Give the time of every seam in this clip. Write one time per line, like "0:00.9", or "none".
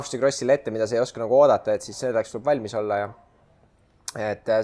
none